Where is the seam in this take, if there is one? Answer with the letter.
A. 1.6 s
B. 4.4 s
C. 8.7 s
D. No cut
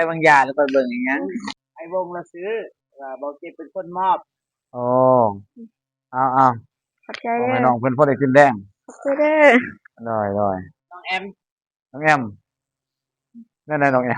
A